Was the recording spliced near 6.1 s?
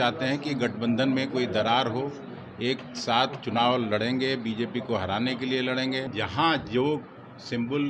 yes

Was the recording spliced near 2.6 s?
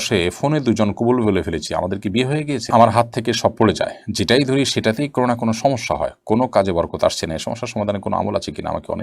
yes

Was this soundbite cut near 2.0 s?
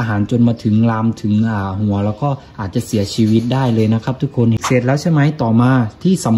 no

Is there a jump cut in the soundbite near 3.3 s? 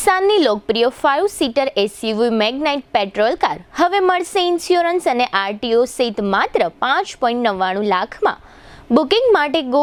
no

